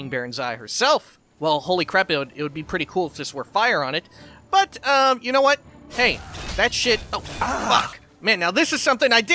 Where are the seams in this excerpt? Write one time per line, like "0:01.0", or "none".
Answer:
0:01.2